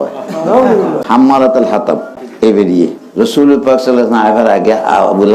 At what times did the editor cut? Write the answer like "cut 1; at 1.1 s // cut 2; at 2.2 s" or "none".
cut 1; at 1.0 s // cut 2; at 2.2 s